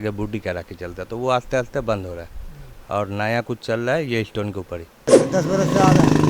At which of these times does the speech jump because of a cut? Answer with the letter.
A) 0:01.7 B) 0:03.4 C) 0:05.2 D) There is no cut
C